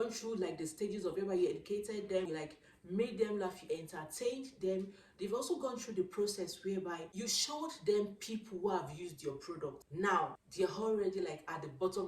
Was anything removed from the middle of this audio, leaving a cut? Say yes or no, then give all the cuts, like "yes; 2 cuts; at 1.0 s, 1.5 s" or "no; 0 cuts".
yes; 4 cuts; at 2.3 s, 7.1 s, 9.8 s, 10.4 s